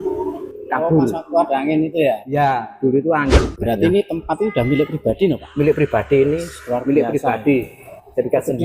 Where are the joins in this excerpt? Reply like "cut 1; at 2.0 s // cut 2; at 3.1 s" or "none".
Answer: cut 1; at 3.4 s

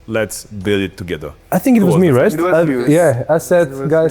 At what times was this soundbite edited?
cut 1; at 1.4 s

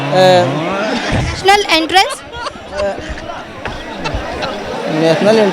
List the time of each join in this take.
cut 1; at 1.2 s

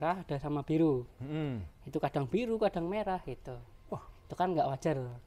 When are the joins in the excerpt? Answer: none

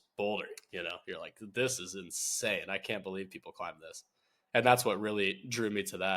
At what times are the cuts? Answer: cut 1; at 4.3 s

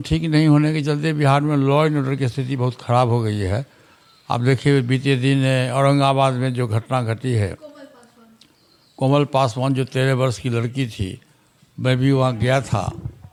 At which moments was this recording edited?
none

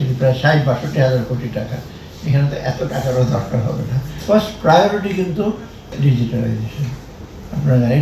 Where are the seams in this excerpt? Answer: cut 1; at 4.2 s // cut 2; at 5.9 s

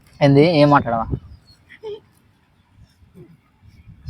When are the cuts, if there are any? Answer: none

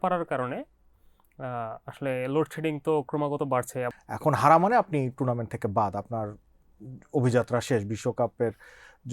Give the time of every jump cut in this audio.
cut 1; at 3.9 s

